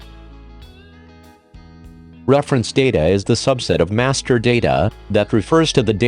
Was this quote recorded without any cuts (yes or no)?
no